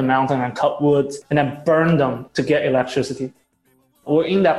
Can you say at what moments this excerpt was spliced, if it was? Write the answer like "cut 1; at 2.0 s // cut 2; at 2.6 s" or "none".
cut 1; at 3.6 s